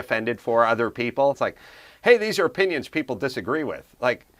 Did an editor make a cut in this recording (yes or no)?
yes